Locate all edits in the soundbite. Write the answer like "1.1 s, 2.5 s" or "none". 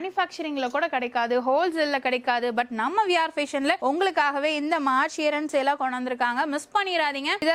none